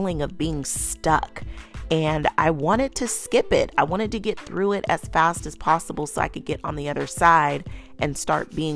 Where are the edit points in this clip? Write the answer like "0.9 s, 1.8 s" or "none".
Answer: none